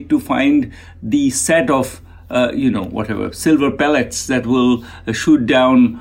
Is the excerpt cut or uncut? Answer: uncut